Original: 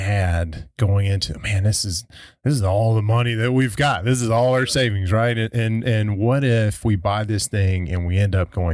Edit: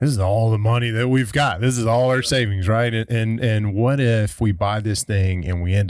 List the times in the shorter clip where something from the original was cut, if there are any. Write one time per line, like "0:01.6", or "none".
none